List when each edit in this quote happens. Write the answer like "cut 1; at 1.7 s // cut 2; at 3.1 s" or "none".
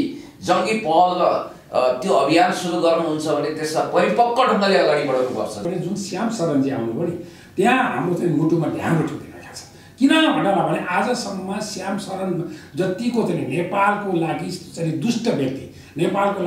cut 1; at 5.6 s